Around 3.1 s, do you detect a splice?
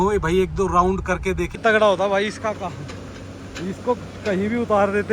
no; 1 cut; at 1.5 s

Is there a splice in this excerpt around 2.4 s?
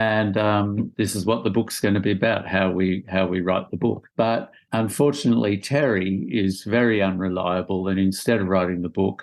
no; 2 cuts; at 0.9 s, 4.2 s

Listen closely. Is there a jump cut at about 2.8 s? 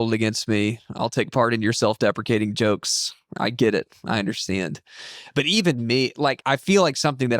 no; 1 cut; at 6.4 s

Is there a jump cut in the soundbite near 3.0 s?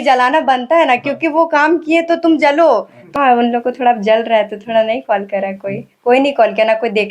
yes; 1 cut; at 3.0 s

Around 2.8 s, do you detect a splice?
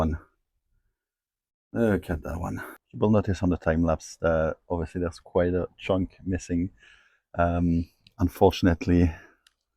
yes; 1 cut; at 2.8 s

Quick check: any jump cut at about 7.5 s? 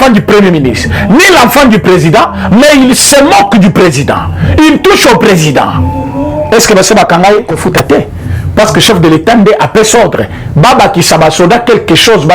yes; 1 cut; at 7.5 s

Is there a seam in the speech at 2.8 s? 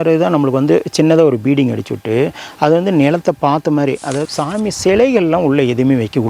no; 1 cut; at 4.2 s

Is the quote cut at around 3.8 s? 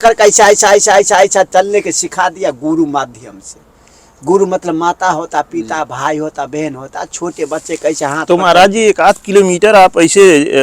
no; 0 cuts

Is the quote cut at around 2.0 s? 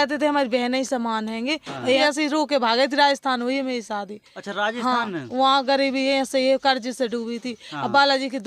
yes; 1 cut; at 2.0 s

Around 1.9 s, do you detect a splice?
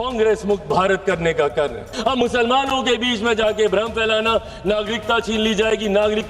yes; 1 cut; at 1.9 s

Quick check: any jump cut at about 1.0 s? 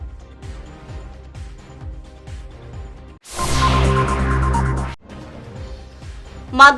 no; 2 cuts; at 4.9 s, 5.9 s

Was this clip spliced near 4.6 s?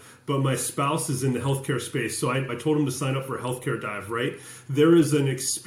no; 1 cut; at 2.5 s

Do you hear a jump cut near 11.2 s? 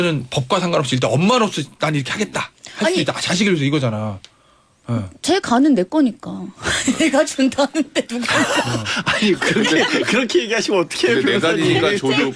no; 0 cuts

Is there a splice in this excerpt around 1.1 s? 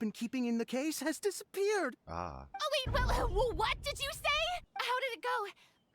no; 1 cut; at 4.7 s

